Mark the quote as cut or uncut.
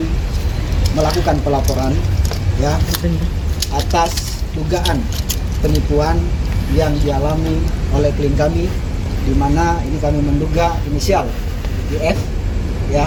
uncut